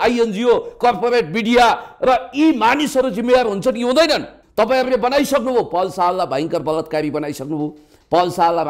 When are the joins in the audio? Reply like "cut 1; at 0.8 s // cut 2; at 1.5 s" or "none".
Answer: cut 1; at 4.4 s